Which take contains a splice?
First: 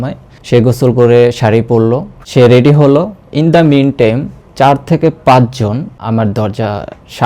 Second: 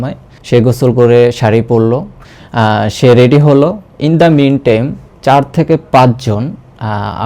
first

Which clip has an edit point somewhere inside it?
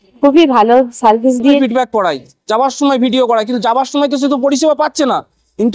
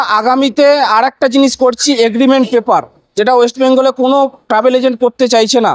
first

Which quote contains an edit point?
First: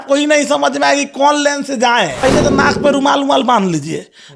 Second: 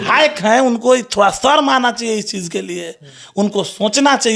first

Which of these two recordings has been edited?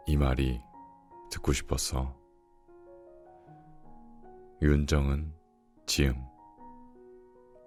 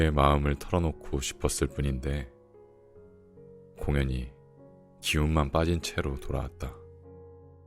second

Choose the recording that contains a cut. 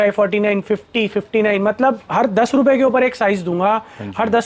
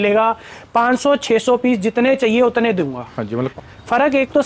second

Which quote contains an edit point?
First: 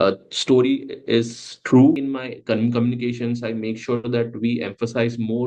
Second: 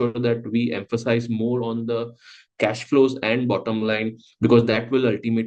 first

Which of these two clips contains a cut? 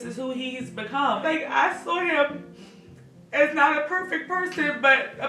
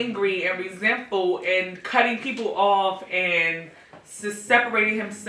first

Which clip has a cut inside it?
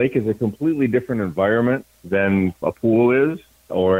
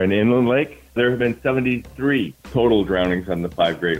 second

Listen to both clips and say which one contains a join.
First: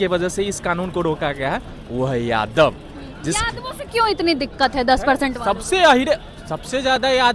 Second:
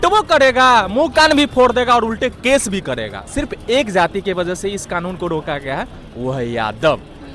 second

